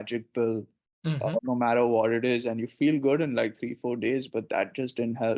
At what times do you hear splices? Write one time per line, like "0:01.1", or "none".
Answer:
0:01.4